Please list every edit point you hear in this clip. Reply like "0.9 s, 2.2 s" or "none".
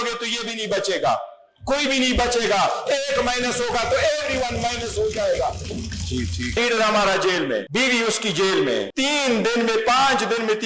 6.6 s, 7.7 s, 8.9 s